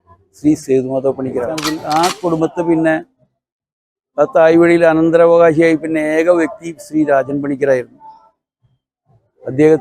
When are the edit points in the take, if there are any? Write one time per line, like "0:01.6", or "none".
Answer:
0:01.7